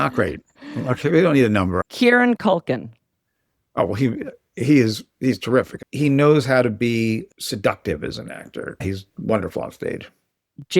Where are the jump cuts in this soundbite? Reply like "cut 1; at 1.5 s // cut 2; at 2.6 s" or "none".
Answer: cut 1; at 1.8 s // cut 2; at 5.8 s // cut 3; at 8.6 s

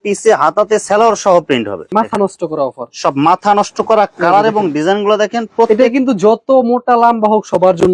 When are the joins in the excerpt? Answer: cut 1; at 1.9 s

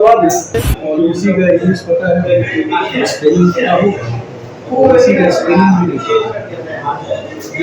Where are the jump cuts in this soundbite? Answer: cut 1; at 1.1 s

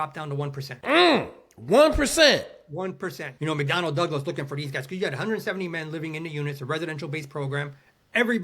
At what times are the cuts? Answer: cut 1; at 3.3 s

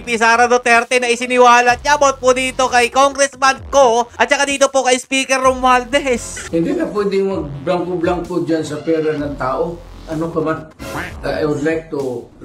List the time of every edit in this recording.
cut 1; at 6.3 s // cut 2; at 11.1 s

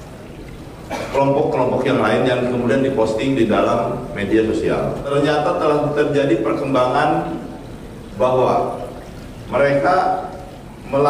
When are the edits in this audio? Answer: cut 1; at 5.1 s

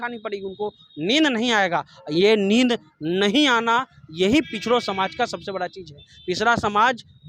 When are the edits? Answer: none

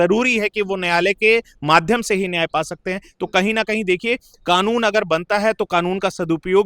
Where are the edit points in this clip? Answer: none

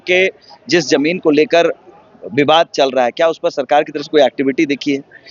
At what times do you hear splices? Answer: none

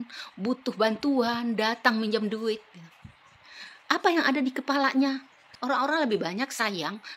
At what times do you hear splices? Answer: cut 1; at 5.5 s

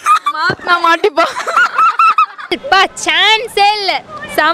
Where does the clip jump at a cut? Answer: cut 1; at 2.4 s

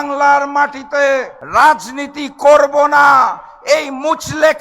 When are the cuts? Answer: cut 1; at 1.4 s

